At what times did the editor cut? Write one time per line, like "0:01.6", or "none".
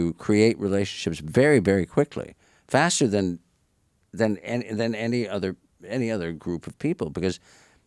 none